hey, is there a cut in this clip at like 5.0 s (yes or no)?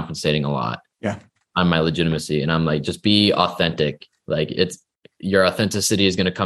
no